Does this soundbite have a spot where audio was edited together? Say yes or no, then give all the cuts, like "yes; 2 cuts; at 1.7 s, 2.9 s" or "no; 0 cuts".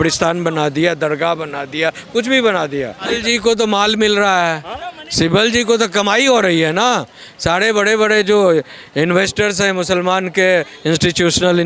yes; 1 cut; at 3.1 s